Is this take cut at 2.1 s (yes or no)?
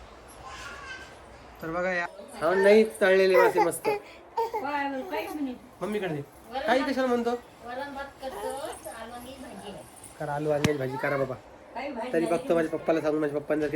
yes